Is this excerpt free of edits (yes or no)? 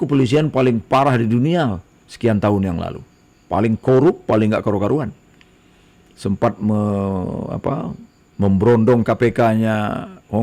yes